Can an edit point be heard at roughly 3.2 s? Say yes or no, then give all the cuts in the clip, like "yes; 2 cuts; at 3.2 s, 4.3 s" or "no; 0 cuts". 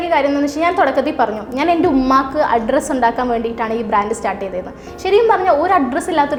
no; 0 cuts